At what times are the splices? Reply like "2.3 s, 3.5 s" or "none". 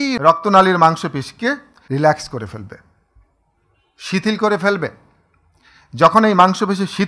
1.7 s

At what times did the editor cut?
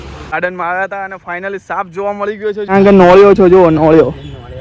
2.7 s

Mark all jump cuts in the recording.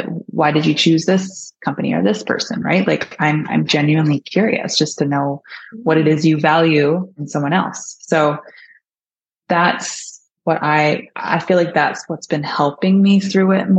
none

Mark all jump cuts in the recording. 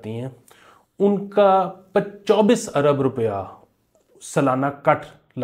none

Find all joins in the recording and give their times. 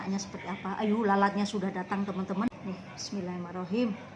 2.5 s

